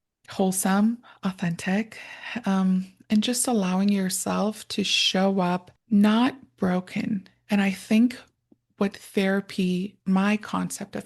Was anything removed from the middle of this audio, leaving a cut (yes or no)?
yes